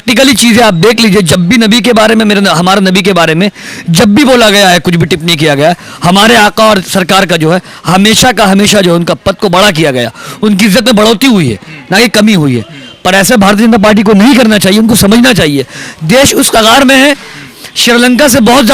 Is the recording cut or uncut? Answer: uncut